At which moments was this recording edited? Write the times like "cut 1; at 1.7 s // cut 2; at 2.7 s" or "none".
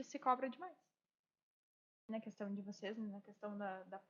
cut 1; at 2.1 s